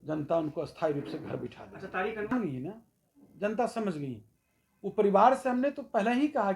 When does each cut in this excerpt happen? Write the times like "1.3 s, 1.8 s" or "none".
2.3 s